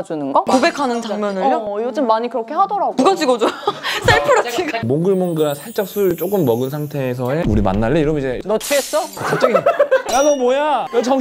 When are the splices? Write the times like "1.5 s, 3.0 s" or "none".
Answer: 4.8 s, 7.4 s